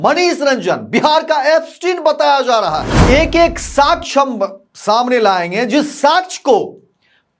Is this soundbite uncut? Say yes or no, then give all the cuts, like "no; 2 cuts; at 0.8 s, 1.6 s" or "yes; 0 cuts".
no; 1 cut; at 2.9 s